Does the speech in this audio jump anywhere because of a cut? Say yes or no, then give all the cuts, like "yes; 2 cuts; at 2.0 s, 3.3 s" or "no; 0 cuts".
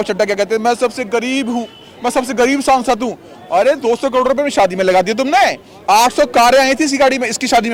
no; 0 cuts